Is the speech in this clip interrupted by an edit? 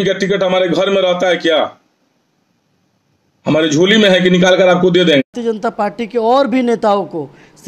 yes; 1 cut; at 5.2 s

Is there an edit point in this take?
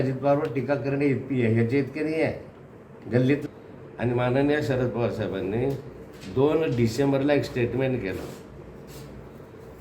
yes; 1 cut; at 3.5 s

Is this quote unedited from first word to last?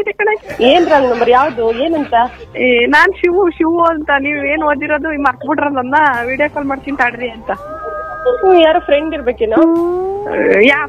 yes; 0 cuts

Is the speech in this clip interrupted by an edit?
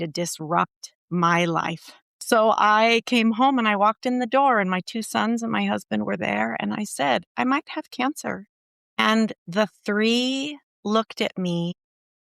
yes; 1 cut; at 2.1 s

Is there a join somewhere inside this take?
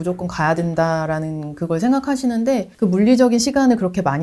yes; 1 cut; at 2.7 s

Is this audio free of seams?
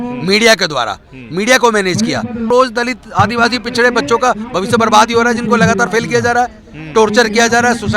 no; 1 cut; at 2.5 s

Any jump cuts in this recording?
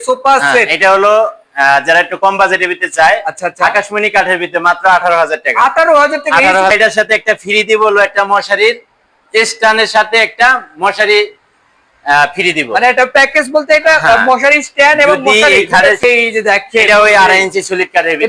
yes; 2 cuts; at 6.7 s, 16.0 s

